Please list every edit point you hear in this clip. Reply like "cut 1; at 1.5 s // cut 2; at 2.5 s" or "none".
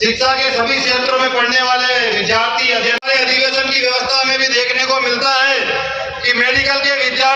none